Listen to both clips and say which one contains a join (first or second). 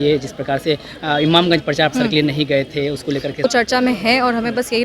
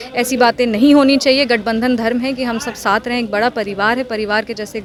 first